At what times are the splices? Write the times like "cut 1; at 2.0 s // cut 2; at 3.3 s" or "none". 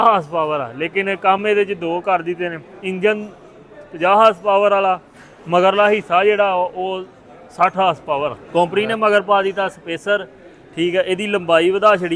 cut 1; at 8.4 s